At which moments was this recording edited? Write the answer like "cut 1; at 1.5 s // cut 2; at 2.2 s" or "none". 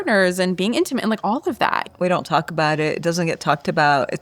cut 1; at 1.9 s